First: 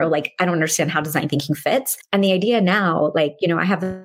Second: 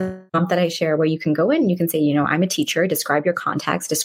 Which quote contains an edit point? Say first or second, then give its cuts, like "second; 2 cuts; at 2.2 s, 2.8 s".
first; 1 cut; at 2.0 s